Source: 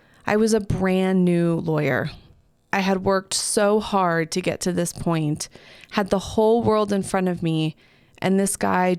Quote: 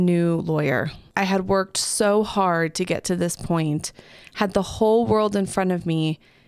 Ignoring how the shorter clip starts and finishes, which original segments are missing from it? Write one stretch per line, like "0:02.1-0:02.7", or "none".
0:02.2-0:02.6